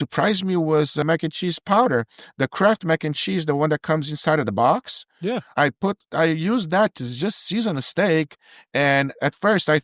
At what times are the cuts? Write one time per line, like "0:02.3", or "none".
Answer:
0:01.0
0:05.5